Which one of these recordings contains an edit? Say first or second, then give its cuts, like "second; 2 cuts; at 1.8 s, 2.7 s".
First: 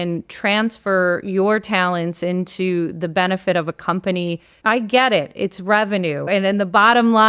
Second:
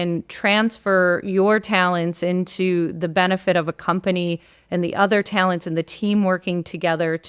first; 2 cuts; at 4.5 s, 6.3 s